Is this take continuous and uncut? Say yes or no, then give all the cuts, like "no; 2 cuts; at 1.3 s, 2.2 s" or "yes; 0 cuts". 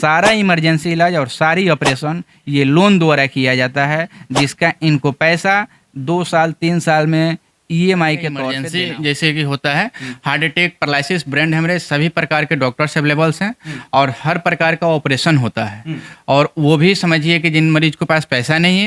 no; 1 cut; at 8.6 s